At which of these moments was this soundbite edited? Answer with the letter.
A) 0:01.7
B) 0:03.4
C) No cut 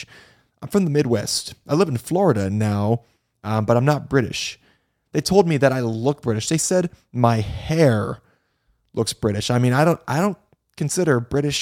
C